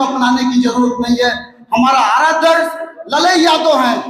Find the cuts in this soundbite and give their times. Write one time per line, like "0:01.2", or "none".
none